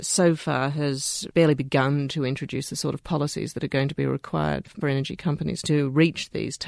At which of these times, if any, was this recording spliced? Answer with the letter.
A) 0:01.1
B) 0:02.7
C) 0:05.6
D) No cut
C